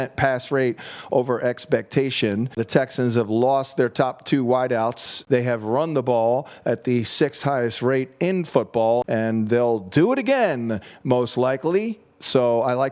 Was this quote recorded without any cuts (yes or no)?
no